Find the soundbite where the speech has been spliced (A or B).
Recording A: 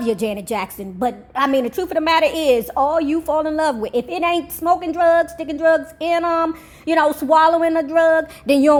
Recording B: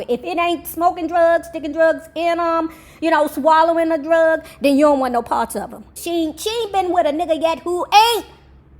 B